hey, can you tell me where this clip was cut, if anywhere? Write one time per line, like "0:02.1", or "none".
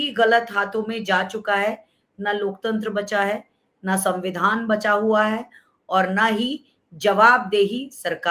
none